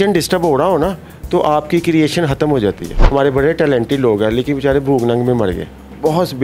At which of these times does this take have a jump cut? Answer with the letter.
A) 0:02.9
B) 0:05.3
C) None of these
A